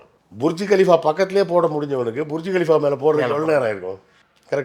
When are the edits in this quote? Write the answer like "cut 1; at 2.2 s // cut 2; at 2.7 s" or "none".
none